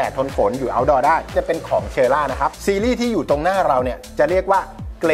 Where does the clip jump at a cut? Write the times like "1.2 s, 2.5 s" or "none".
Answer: none